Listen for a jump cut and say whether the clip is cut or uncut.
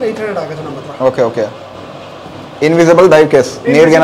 uncut